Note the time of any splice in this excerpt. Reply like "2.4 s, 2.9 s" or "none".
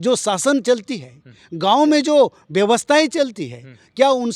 none